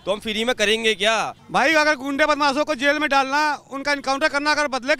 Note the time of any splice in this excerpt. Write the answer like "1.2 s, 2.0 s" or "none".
1.4 s